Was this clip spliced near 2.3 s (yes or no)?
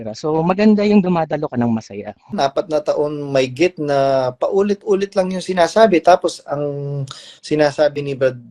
yes